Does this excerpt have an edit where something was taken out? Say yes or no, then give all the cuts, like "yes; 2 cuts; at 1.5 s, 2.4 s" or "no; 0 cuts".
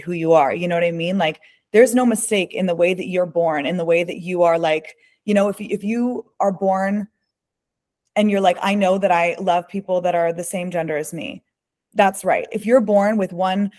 no; 0 cuts